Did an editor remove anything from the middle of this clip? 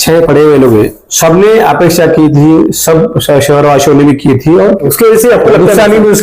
yes; 1 cut; at 4.9 s

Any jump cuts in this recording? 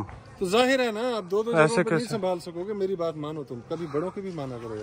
no; 0 cuts

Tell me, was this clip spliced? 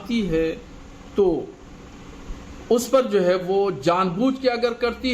yes; 1 cut; at 3.4 s

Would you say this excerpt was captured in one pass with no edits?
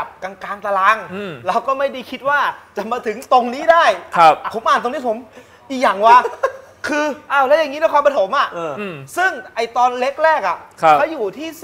yes; 0 cuts

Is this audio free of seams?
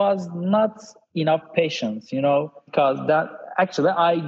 no; 1 cut; at 2.6 s

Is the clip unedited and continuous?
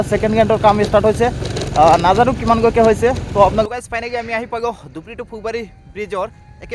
no; 1 cut; at 3.6 s

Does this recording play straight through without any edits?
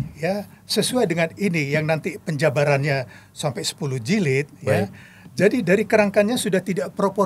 yes; 0 cuts

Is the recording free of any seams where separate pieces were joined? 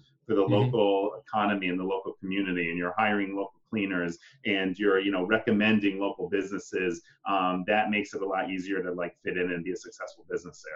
yes; 0 cuts

